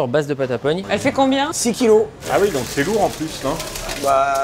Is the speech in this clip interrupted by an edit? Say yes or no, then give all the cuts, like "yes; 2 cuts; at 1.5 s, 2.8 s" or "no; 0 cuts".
yes; 1 cut; at 1.2 s